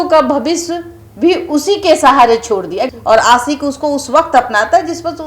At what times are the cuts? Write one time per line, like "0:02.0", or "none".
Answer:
0:02.9